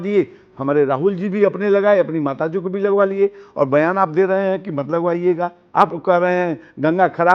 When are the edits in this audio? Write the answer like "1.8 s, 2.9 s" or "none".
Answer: 5.6 s